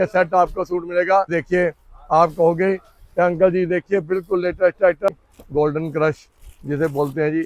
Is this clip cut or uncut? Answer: cut